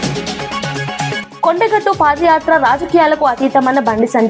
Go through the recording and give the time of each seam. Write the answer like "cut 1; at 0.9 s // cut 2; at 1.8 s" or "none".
cut 1; at 1.2 s